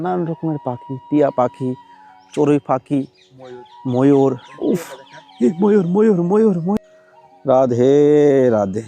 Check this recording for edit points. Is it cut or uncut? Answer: cut